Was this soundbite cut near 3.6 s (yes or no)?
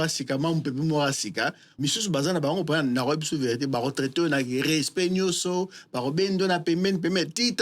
no